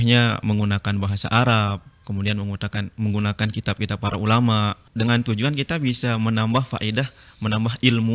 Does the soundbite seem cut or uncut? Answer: cut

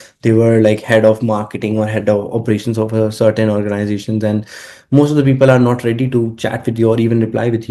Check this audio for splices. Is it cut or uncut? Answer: uncut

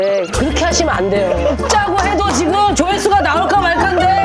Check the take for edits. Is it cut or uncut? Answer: uncut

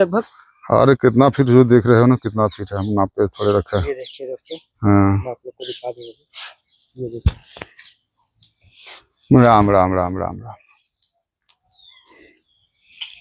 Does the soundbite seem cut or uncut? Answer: uncut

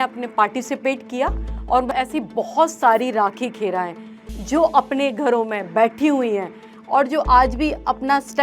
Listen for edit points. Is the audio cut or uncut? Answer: cut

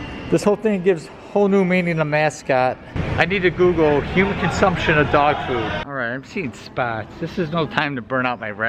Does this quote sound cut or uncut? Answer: cut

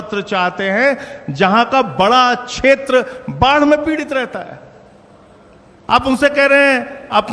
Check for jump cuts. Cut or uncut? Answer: uncut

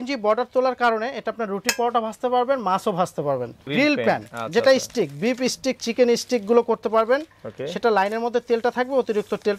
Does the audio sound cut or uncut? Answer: cut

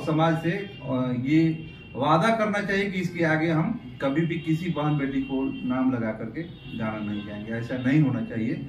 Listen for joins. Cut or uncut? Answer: uncut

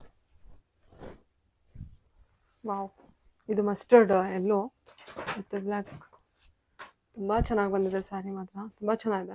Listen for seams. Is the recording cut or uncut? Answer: uncut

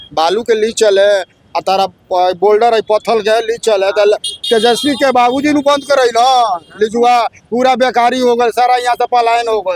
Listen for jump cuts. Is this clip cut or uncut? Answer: uncut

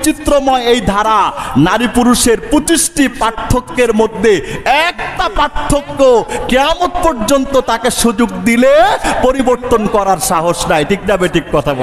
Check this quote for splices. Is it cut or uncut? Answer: uncut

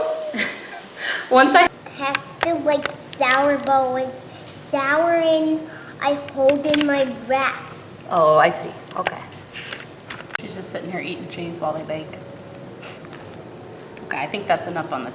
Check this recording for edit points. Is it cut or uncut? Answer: cut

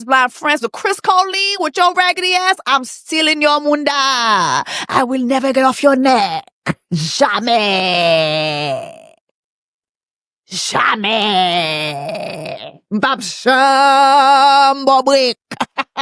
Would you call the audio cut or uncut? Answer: uncut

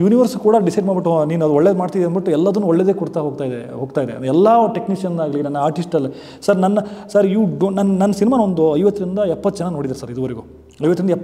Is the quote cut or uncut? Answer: uncut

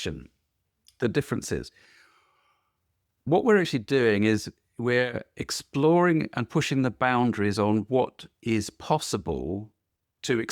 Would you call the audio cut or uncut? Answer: cut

